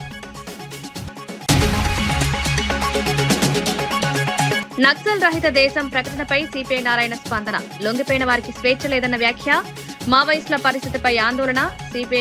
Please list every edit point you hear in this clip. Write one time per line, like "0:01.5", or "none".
0:01.1
0:04.6